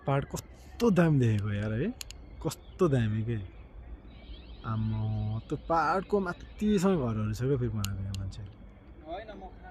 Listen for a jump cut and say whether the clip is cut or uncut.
uncut